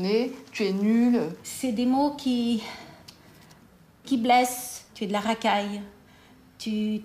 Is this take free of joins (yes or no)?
no